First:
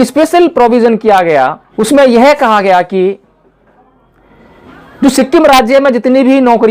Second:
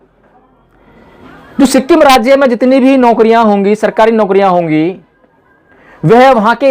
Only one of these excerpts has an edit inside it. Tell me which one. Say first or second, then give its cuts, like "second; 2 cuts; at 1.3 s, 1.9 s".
first; 1 cut; at 1.7 s